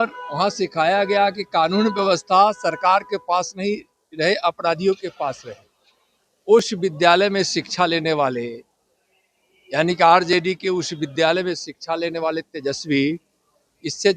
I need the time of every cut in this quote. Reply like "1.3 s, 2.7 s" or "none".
none